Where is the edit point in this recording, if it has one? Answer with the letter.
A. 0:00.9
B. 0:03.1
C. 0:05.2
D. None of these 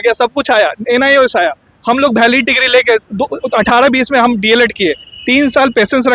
B